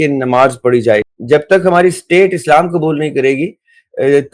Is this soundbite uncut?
no; 1 cut; at 1.1 s

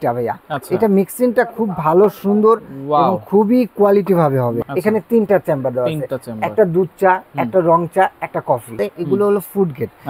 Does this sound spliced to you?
yes; 2 cuts; at 4.6 s, 8.8 s

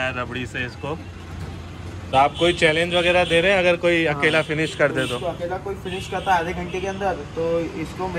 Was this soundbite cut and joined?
yes; 1 cut; at 2.1 s

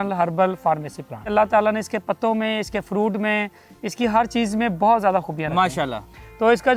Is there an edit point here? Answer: yes; 1 cut; at 1.3 s

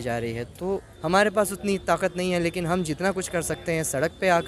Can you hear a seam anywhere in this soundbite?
yes; 1 cut; at 0.9 s

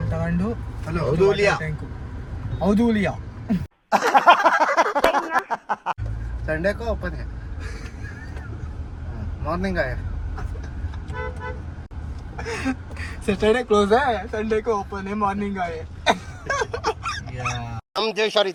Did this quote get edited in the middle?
no; 0 cuts

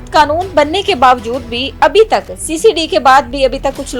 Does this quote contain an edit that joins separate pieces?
no; 0 cuts

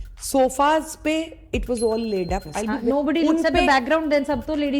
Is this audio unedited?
no; 1 cut; at 2.8 s

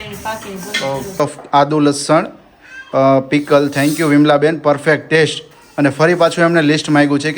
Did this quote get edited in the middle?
yes; 1 cut; at 1.2 s

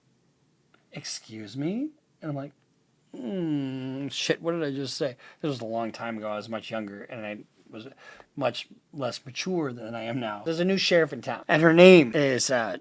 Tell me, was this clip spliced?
yes; 3 cuts; at 10.4 s, 11.3 s, 12.1 s

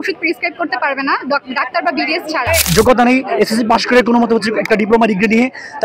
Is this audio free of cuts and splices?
no; 1 cut; at 2.6 s

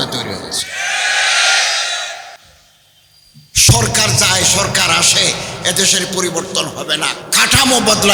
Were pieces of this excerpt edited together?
no; 0 cuts

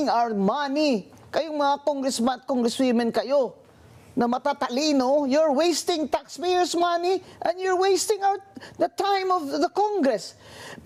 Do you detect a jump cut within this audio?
no; 0 cuts

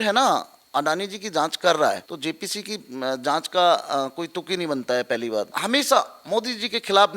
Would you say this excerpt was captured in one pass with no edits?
no; 2 cuts; at 2.1 s, 5.6 s

